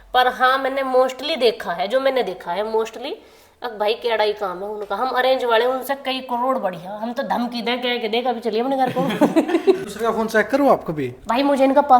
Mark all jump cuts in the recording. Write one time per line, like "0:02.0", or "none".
0:09.9